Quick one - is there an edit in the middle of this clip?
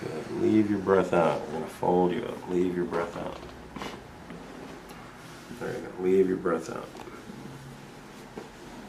no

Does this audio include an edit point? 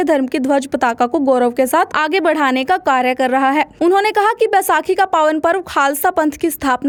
no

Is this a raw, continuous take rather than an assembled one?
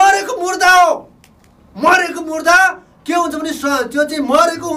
yes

